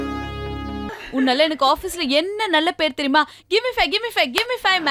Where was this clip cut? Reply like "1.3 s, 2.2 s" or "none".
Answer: 0.9 s